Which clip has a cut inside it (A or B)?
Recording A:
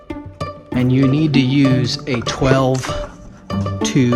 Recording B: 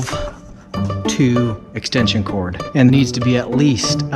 B